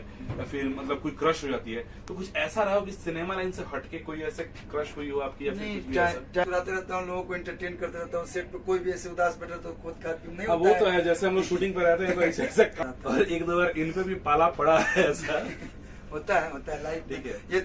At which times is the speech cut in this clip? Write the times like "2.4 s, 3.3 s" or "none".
6.4 s, 12.7 s